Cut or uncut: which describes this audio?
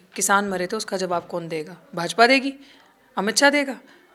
uncut